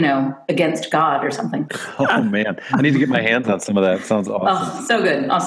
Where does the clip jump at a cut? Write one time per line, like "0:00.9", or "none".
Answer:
0:01.8